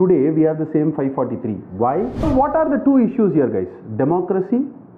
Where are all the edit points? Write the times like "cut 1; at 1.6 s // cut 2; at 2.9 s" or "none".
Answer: cut 1; at 2.2 s